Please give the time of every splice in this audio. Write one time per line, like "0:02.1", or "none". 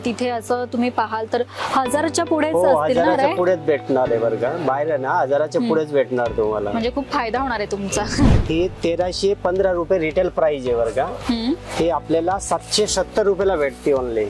0:08.4